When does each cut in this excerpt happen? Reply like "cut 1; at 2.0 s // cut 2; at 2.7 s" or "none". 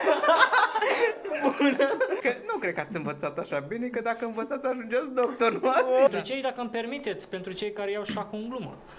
cut 1; at 2.2 s // cut 2; at 6.1 s